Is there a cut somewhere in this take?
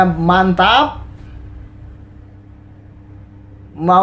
no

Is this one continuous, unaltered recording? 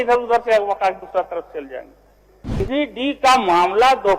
no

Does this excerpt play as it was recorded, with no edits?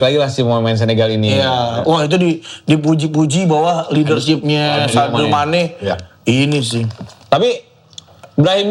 yes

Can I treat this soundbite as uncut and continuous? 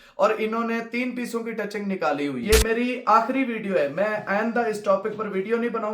no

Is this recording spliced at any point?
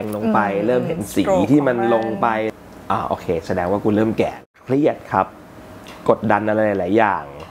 yes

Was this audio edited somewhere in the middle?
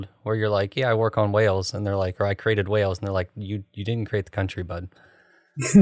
no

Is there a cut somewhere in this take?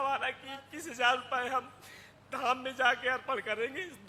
no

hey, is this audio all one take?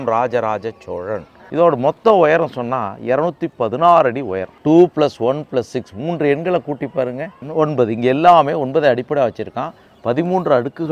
no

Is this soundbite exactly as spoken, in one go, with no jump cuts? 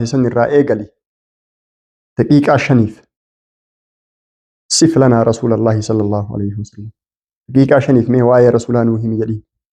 yes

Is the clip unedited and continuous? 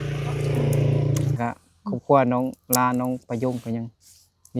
no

